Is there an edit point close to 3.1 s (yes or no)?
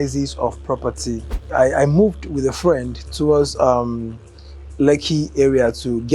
no